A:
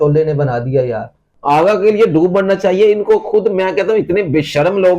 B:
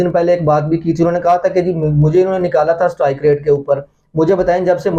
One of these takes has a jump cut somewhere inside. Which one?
A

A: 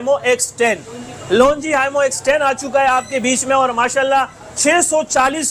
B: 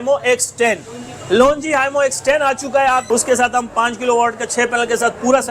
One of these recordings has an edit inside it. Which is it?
B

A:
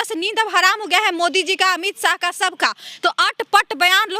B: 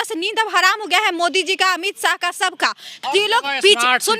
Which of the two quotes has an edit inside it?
B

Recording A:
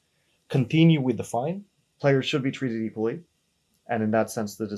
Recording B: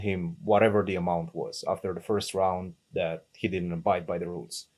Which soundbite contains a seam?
A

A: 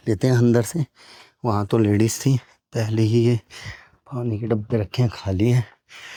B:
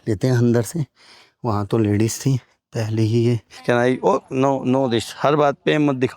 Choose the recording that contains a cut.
B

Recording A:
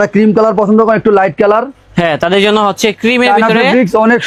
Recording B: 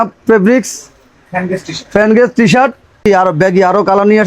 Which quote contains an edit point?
B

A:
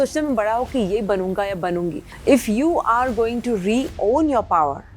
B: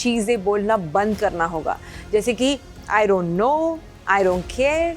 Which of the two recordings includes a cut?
A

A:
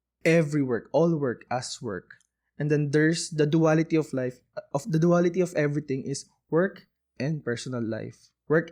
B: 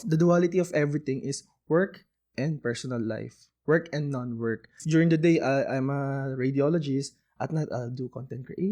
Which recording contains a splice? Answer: B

